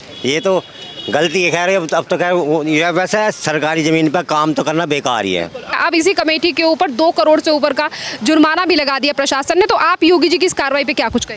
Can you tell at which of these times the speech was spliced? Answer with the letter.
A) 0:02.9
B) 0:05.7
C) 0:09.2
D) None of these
B